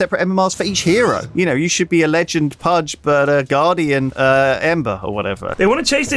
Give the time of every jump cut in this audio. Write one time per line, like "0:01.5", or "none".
0:01.2
0:02.9
0:04.1
0:05.0

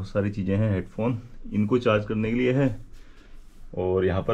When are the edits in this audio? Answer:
none

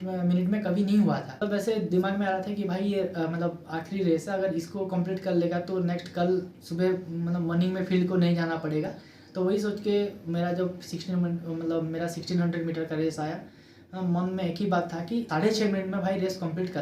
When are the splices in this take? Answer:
none

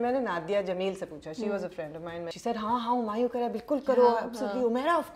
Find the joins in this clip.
0:02.3

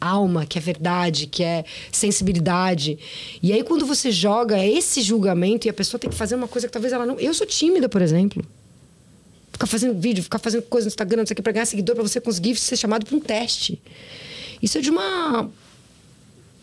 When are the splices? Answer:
none

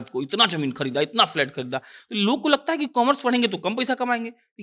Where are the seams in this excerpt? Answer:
none

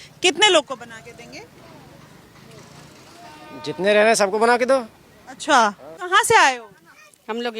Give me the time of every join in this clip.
0:05.9

